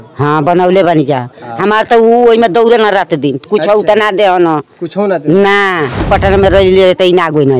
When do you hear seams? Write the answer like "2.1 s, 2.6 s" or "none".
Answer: 6.1 s